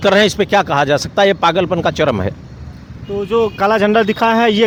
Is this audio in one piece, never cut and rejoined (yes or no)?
yes